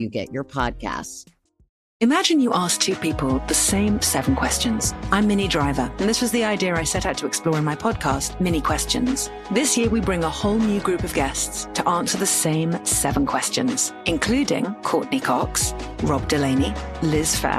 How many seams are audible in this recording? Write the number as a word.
one